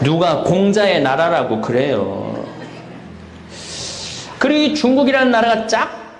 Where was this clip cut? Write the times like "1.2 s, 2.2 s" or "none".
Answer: 4.4 s